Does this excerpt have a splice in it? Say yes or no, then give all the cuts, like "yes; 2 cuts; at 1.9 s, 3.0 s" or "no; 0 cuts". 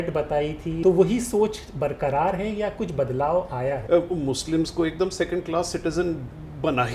yes; 2 cuts; at 0.8 s, 3.8 s